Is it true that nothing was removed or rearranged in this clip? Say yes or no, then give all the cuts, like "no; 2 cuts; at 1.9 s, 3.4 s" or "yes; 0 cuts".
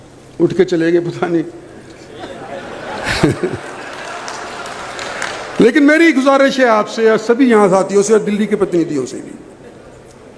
yes; 0 cuts